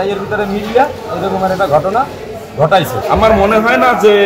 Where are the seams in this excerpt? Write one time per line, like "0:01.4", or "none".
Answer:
0:03.0